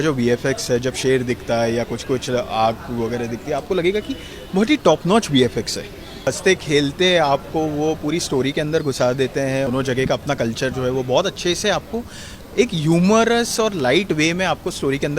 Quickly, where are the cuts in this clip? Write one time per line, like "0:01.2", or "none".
0:06.2
0:09.7